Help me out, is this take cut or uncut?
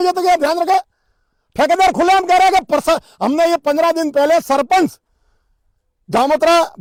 uncut